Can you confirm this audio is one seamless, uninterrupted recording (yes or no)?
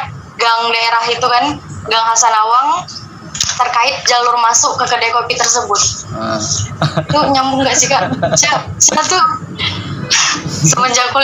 yes